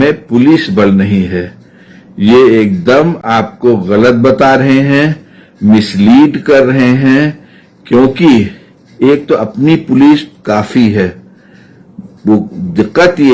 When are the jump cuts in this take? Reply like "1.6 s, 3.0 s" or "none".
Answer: none

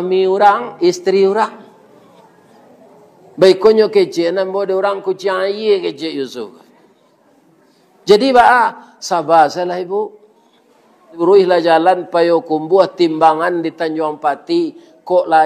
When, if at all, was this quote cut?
11.2 s

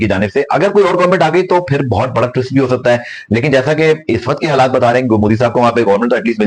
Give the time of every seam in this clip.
none

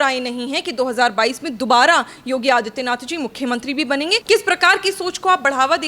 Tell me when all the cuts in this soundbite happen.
4.2 s

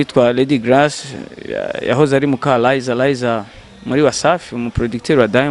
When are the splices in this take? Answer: none

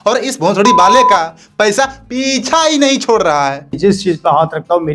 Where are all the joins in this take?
3.8 s

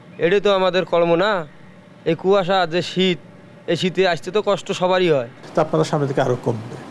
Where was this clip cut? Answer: 5.4 s

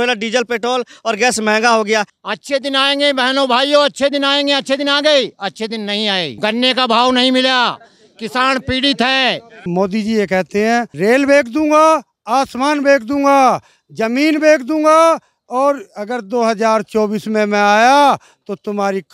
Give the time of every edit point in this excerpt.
2.2 s, 6.3 s, 9.7 s, 10.9 s

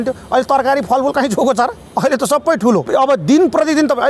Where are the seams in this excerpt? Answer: 1.8 s, 2.9 s

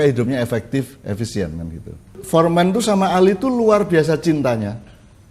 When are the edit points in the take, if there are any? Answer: 2.2 s

